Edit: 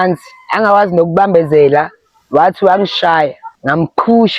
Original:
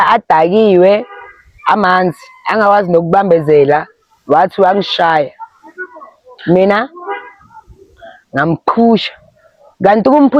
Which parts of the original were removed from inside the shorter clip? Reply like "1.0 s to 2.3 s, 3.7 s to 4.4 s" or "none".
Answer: 5.4 s to 8.2 s